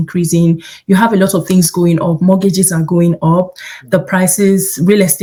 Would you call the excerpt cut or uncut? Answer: uncut